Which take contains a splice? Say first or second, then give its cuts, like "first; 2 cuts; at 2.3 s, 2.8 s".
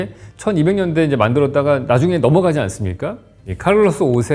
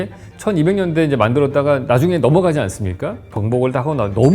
second; 1 cut; at 3.3 s